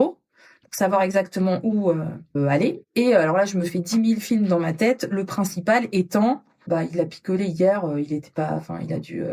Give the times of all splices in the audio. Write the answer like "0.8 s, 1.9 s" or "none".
2.3 s, 6.6 s